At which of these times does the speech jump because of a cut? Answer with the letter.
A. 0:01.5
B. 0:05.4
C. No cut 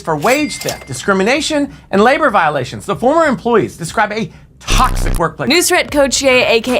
B